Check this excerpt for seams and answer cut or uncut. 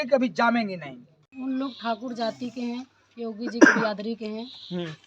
cut